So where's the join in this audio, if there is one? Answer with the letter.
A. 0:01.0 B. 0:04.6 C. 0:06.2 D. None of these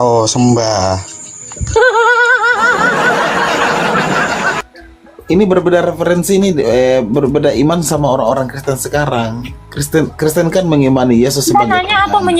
B